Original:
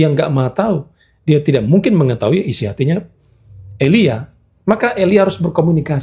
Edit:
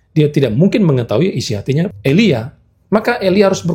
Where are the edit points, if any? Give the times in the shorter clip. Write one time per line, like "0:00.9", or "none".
0:01.9